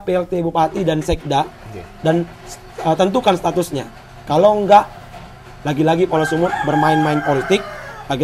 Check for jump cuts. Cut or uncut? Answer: uncut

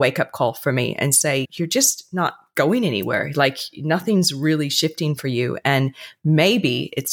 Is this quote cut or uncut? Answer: uncut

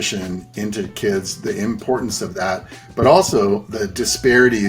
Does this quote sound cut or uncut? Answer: cut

